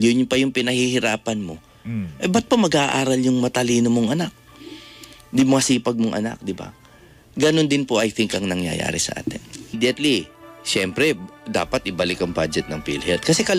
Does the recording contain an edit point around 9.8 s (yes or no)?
yes